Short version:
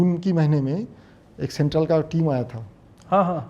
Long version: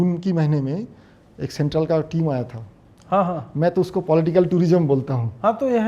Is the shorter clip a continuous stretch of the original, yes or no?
yes